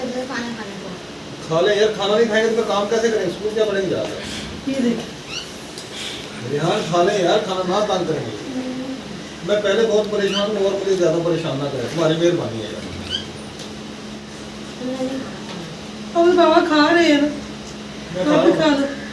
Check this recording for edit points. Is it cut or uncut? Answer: cut